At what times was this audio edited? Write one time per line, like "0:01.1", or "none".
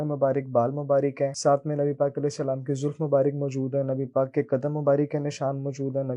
0:01.4